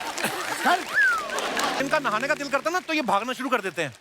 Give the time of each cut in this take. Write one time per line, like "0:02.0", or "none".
0:01.8

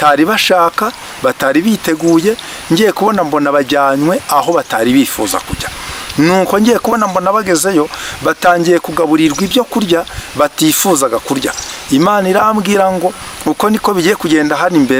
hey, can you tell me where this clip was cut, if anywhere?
none

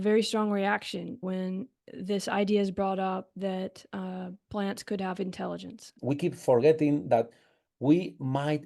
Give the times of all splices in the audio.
0:01.2
0:05.9

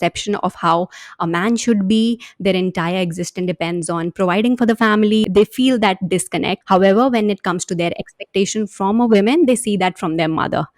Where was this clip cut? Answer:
0:05.2
0:06.6

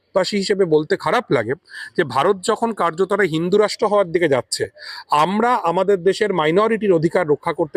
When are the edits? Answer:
none

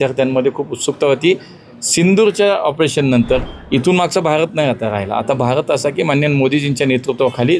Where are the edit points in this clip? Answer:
0:03.5

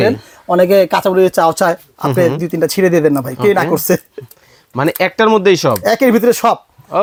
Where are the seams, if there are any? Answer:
none

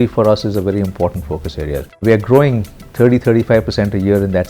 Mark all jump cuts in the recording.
0:02.0

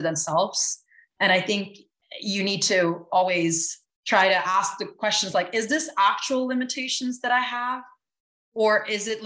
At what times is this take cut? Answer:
none

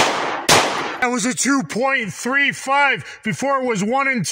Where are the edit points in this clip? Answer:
0:01.0

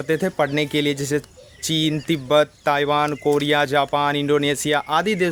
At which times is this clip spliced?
none

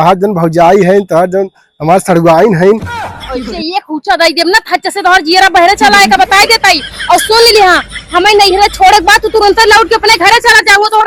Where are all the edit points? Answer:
none

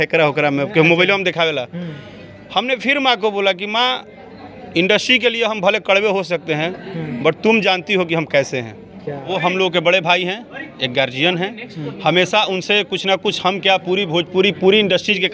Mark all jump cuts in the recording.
0:09.3

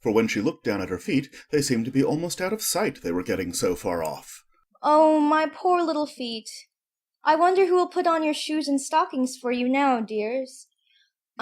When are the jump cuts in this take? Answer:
0:07.2

